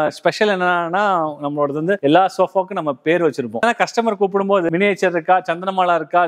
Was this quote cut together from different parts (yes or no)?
no